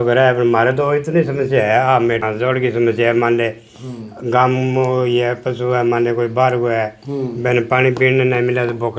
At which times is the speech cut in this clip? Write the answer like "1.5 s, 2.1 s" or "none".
2.2 s